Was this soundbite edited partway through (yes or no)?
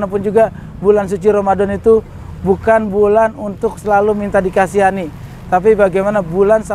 no